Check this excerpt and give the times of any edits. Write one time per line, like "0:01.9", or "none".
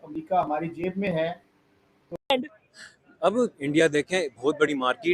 0:02.1